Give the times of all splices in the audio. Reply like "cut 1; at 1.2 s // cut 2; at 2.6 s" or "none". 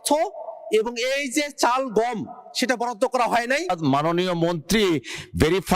cut 1; at 3.8 s